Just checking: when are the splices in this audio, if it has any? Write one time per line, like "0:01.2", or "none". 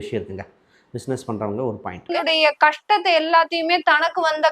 0:02.1